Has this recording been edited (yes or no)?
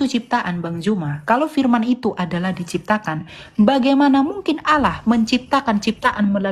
no